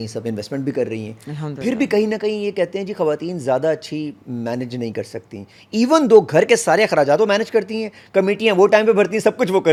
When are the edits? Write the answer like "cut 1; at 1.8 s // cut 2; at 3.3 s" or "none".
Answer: none